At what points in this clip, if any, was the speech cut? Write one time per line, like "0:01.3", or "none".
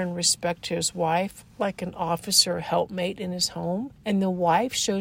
0:03.9